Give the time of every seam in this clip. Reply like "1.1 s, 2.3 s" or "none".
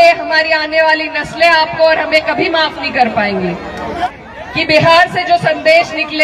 4.1 s